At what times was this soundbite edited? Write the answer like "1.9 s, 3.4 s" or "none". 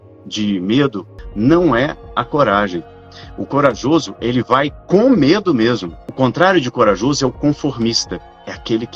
1.2 s, 6.1 s